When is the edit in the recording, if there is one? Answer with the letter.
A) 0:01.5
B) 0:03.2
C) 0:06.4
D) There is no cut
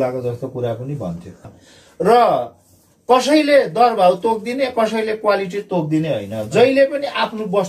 A